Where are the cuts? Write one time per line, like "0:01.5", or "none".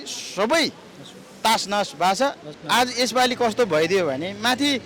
0:02.5